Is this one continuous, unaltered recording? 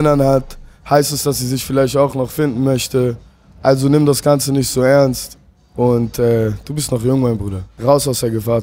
no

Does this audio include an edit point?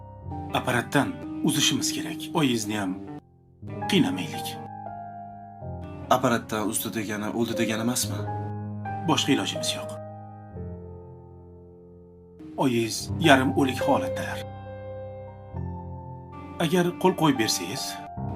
yes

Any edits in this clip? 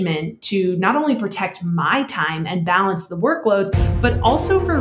no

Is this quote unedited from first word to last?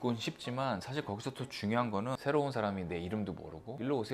no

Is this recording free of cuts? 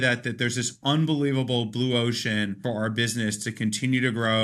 no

